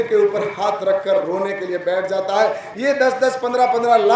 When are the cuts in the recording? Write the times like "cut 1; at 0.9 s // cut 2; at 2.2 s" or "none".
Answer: cut 1; at 2.7 s